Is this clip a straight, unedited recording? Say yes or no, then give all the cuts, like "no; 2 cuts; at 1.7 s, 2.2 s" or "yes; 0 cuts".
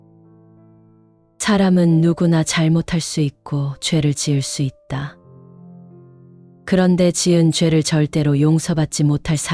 no; 3 cuts; at 0.9 s, 5.1 s, 6.6 s